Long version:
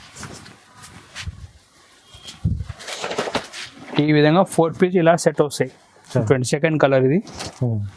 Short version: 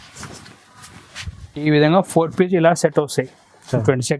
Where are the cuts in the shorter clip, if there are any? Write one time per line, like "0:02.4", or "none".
0:01.6